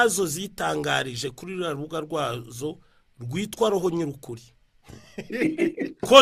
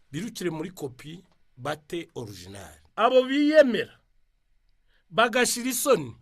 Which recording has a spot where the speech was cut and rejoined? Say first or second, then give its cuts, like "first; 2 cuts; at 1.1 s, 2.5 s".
second; 1 cut; at 2.8 s